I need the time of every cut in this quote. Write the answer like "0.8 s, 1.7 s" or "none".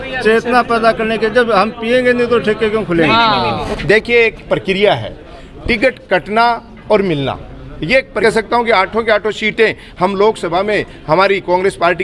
3.6 s, 8.2 s